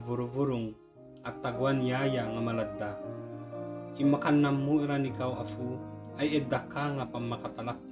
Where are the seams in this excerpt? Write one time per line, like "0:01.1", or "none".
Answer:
none